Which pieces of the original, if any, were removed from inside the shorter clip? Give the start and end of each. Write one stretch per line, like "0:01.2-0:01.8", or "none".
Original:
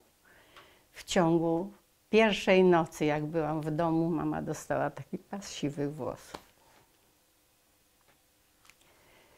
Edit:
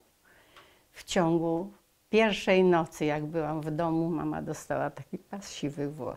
none